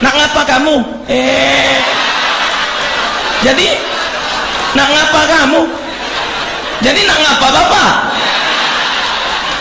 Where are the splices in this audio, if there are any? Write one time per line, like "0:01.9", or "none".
none